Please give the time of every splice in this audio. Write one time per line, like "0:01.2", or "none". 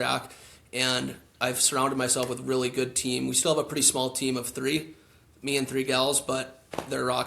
none